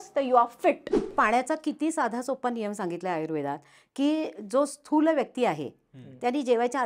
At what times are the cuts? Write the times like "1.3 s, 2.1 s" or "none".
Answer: 1.1 s